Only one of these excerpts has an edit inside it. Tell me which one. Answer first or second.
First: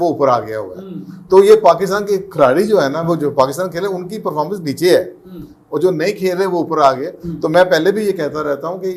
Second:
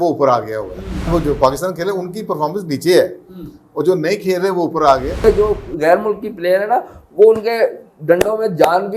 second